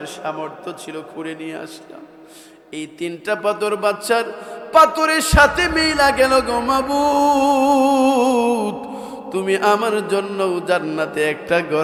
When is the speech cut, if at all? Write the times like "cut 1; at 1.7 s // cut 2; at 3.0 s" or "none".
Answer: none